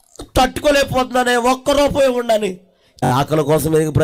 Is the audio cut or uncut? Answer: cut